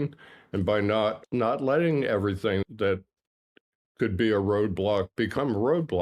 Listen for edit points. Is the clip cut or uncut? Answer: cut